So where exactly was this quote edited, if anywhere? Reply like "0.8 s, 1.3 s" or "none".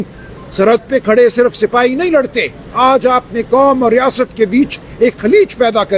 2.6 s